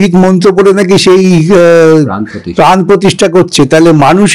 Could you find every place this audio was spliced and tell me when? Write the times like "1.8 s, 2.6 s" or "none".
none